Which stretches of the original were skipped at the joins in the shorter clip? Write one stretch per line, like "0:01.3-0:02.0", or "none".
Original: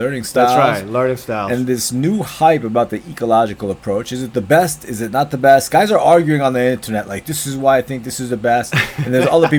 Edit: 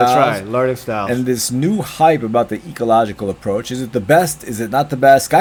none